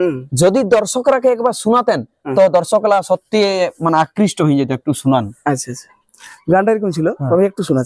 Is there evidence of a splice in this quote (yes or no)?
no